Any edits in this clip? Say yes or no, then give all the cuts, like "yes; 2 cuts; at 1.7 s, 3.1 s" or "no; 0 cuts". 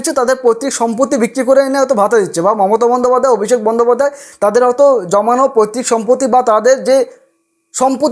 no; 0 cuts